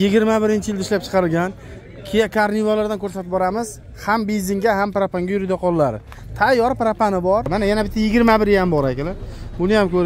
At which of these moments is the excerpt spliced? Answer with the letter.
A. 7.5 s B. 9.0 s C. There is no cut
A